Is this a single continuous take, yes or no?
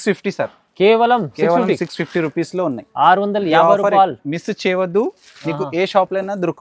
yes